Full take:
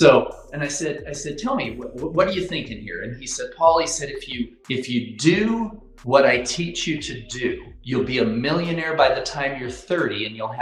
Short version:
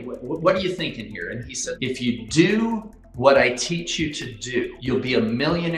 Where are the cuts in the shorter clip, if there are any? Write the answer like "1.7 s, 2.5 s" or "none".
1.7 s, 4.8 s